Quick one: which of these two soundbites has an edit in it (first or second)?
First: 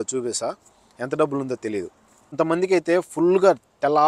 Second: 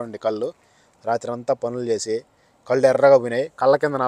first